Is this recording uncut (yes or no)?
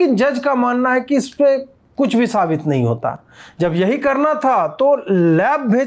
yes